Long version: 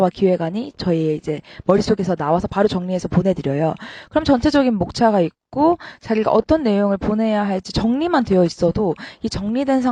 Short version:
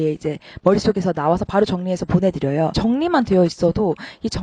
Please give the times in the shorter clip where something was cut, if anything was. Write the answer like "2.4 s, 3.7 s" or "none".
2.7 s